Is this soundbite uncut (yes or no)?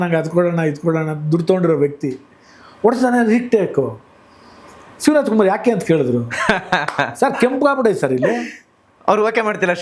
yes